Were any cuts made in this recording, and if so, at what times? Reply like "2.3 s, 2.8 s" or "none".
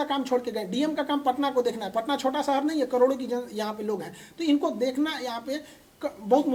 none